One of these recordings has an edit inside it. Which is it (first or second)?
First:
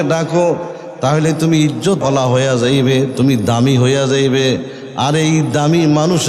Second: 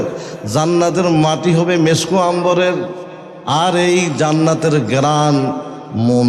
first